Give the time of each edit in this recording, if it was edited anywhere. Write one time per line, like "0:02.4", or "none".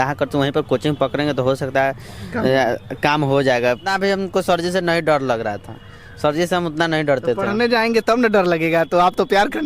0:03.9